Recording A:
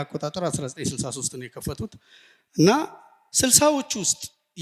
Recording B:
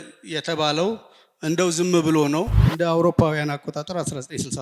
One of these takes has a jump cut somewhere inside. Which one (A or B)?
B